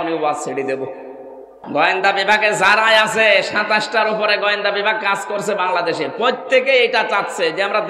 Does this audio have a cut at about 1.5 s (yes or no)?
yes